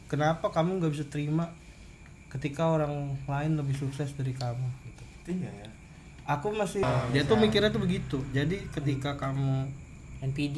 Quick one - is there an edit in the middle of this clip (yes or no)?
yes